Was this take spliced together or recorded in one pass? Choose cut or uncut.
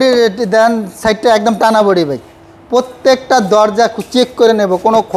uncut